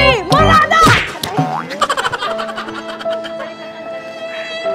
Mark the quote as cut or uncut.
uncut